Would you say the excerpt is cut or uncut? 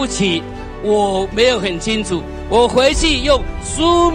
uncut